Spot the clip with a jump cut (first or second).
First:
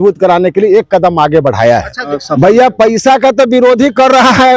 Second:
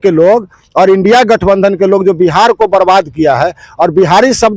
first